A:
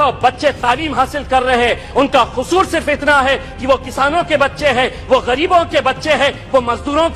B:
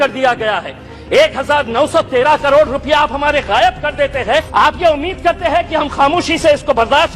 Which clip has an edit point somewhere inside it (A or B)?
B